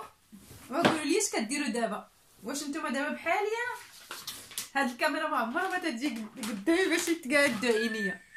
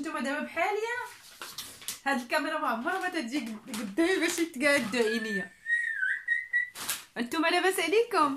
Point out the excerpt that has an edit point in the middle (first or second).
second